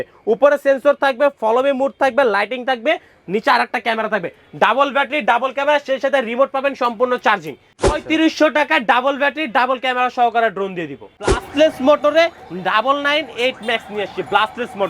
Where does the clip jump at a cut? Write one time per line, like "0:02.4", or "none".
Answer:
0:07.9
0:11.4